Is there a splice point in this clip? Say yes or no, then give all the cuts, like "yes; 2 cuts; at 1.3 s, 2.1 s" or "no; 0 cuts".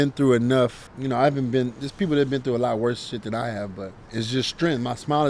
yes; 2 cuts; at 0.9 s, 3.9 s